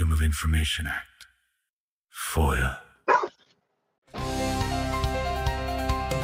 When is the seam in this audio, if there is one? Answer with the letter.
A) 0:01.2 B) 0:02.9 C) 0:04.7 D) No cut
D